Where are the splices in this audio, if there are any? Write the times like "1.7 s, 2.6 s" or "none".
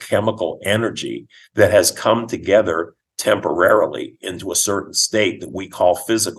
none

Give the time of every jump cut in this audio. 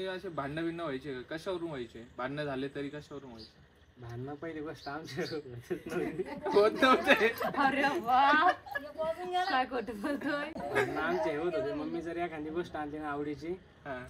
none

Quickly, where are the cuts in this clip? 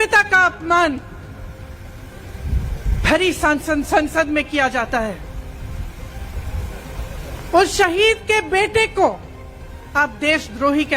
none

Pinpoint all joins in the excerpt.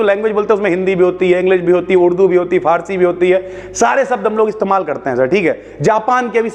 none

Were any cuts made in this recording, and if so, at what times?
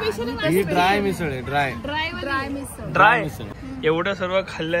1.2 s, 3.5 s

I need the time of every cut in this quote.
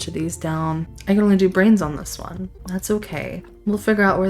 0.9 s, 2.6 s

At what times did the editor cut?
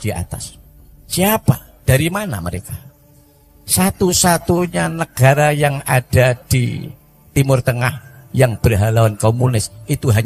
none

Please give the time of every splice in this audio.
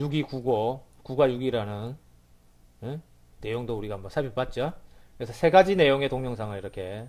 4.7 s

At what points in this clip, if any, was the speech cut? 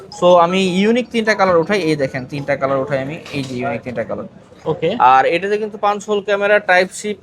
4.6 s

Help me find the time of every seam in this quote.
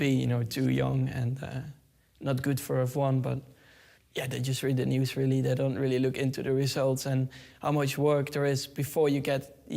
none

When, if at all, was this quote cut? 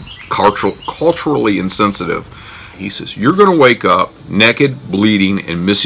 2.7 s

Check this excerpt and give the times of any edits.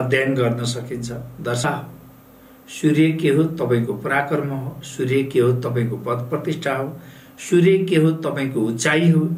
1.6 s

